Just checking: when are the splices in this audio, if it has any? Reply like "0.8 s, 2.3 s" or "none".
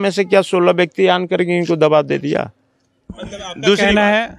none